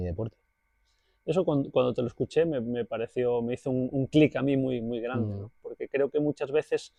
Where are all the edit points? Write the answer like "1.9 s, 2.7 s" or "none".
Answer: none